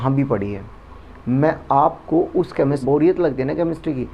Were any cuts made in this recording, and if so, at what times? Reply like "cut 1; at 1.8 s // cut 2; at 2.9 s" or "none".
cut 1; at 2.8 s